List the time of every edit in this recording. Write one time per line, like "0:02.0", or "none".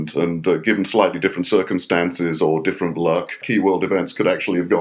0:03.4